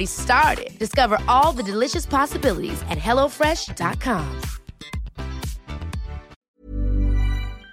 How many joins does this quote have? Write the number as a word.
one